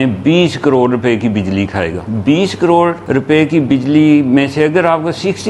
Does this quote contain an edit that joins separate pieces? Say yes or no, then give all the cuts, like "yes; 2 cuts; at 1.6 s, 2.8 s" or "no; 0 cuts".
yes; 2 cuts; at 2.1 s, 3.0 s